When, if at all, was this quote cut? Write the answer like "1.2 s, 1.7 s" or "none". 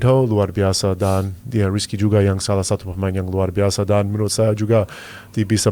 none

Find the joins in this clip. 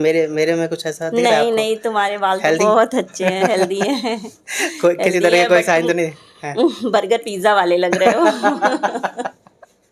none

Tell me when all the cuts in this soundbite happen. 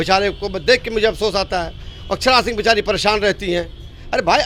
none

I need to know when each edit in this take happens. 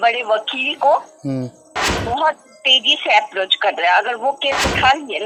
none

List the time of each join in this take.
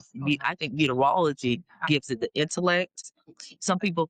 3.1 s

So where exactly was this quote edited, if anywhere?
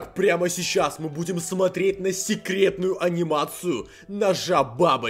none

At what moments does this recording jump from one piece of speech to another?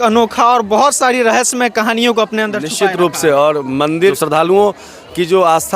4.2 s

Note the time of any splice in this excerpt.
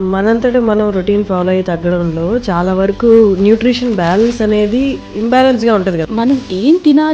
5.1 s, 6.0 s

